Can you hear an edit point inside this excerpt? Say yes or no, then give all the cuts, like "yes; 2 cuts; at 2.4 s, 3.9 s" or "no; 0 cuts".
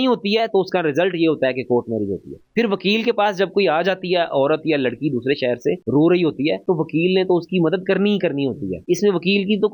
no; 0 cuts